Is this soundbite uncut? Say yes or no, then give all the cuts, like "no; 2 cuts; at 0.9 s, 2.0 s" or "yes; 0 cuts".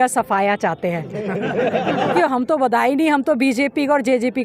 no; 1 cut; at 2.2 s